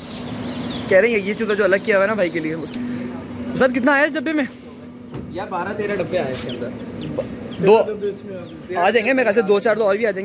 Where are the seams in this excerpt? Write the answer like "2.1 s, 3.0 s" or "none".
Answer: 2.7 s